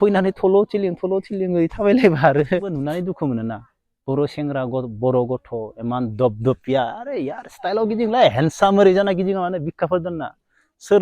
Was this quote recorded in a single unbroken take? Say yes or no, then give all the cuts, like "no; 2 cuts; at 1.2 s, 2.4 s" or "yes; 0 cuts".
no; 1 cut; at 2.9 s